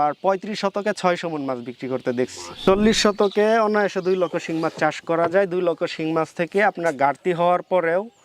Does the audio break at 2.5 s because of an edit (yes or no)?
yes